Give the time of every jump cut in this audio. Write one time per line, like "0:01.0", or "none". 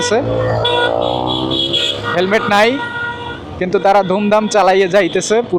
none